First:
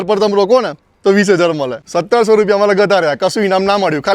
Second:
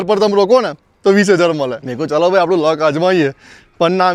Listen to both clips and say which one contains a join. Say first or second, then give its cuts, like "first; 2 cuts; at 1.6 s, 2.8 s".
first; 1 cut; at 1.8 s